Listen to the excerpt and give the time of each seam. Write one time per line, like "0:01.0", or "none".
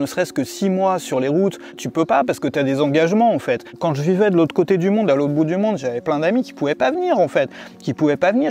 0:01.8
0:03.7